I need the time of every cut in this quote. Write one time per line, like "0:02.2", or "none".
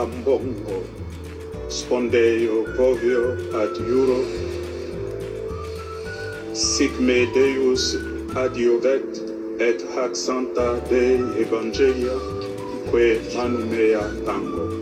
none

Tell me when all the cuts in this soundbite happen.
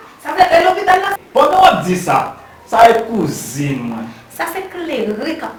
none

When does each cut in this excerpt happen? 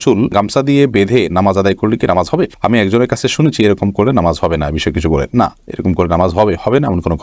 none

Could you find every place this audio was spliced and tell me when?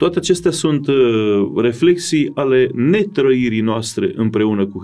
none

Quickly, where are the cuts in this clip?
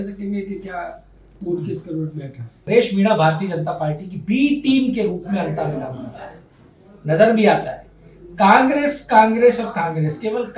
0:02.7

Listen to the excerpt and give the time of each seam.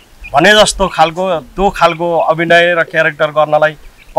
none

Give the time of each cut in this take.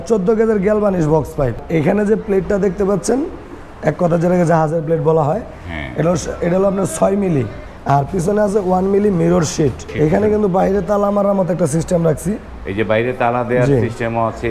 0:01.6
0:07.7
0:09.9

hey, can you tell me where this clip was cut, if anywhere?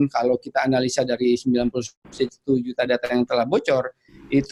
none

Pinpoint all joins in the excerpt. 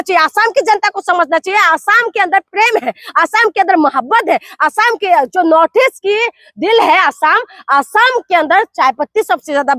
none

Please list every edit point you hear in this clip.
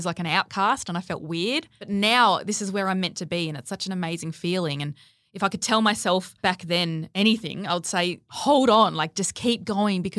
0:01.9
0:06.5
0:08.3

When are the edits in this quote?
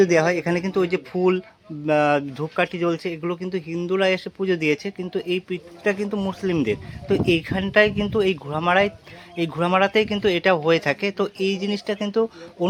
none

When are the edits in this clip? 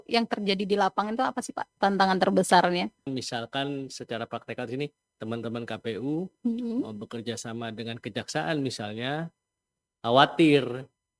0:03.1

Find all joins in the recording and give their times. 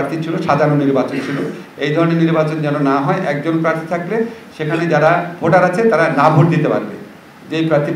none

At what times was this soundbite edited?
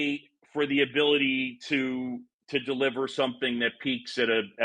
0:02.3

